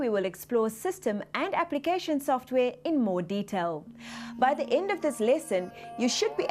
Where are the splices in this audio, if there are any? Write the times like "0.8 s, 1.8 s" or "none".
2.8 s